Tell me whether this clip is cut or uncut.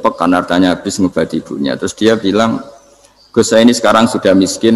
uncut